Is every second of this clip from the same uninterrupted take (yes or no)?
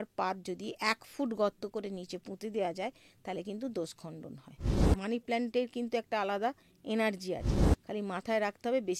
no